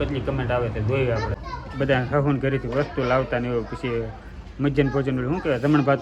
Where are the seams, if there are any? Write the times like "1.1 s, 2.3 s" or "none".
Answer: 1.3 s